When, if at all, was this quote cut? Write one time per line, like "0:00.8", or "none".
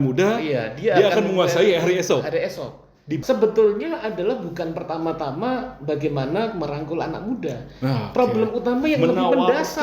0:03.2